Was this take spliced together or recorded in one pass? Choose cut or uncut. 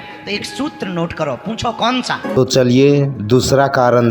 cut